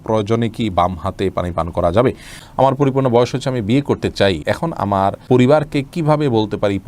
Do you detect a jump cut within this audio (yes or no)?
yes